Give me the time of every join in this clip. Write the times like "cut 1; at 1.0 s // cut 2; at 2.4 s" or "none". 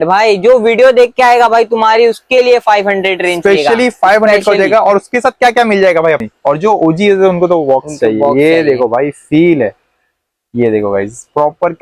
cut 1; at 6.2 s